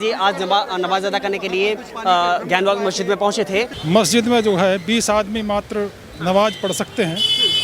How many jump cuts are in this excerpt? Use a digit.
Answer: 1